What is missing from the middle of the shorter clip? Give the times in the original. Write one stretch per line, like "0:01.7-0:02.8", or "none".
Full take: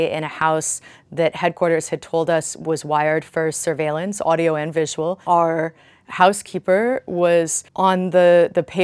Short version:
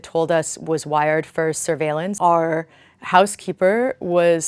0:04.1-0:05.2